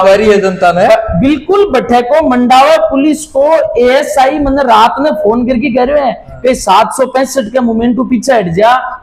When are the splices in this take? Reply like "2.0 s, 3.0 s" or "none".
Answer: none